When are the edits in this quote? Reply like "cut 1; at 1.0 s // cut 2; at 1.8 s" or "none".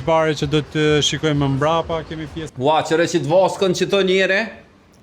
cut 1; at 2.4 s